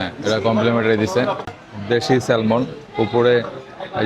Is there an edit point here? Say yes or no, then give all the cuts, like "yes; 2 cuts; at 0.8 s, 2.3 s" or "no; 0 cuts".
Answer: yes; 1 cut; at 1.5 s